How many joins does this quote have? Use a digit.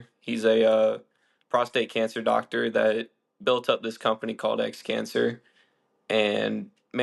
0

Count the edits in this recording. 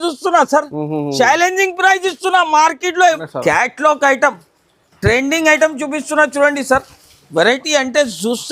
1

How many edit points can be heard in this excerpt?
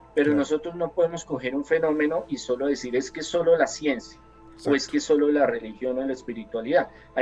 0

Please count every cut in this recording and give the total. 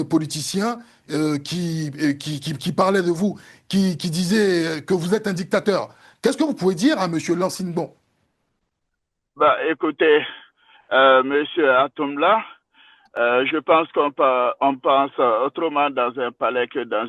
0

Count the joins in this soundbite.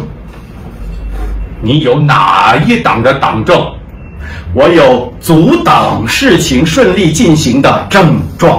0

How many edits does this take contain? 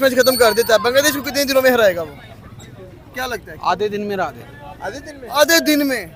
0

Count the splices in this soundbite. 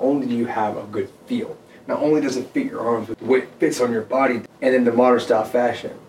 2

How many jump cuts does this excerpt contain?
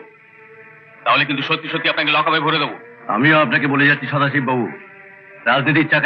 0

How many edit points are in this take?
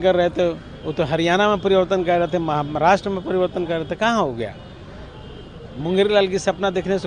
0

